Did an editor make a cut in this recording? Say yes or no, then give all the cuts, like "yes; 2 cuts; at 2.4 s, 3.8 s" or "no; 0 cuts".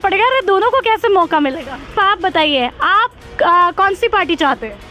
yes; 1 cut; at 2.0 s